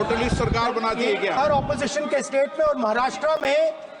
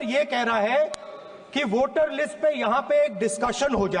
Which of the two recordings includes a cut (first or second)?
first